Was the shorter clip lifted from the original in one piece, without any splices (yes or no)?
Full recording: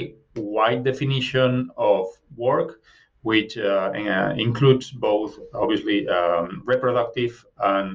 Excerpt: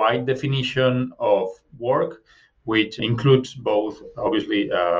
no